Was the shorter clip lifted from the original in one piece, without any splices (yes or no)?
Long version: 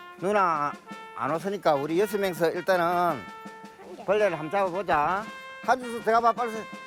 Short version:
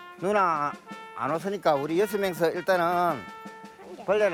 yes